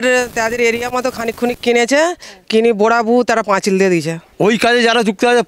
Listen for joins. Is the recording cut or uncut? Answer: cut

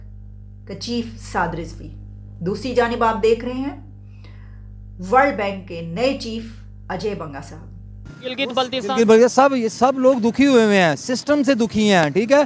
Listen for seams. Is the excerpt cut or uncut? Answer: cut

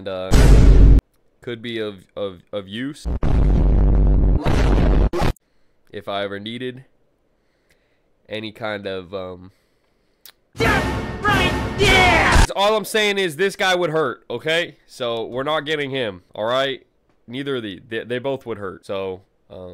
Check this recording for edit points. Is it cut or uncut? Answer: uncut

